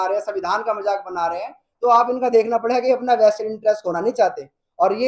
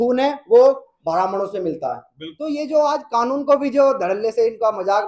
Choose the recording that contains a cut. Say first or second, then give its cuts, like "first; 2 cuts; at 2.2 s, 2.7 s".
second; 1 cut; at 2.3 s